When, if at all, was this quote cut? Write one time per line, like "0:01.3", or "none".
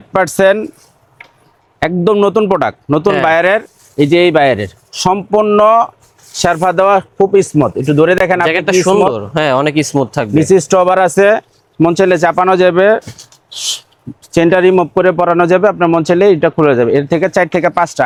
none